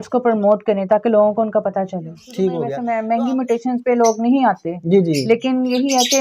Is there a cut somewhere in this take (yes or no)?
yes